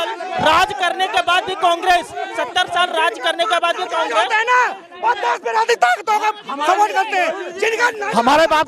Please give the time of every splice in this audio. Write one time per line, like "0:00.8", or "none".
none